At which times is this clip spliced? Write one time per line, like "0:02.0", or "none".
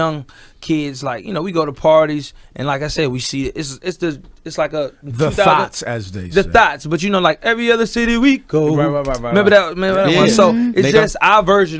0:01.7